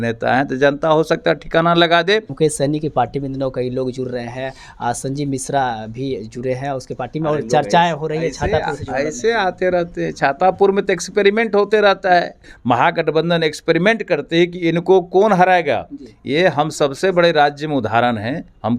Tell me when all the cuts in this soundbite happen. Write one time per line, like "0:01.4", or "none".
0:02.3
0:12.5